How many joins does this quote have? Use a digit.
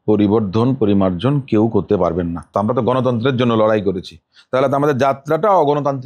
1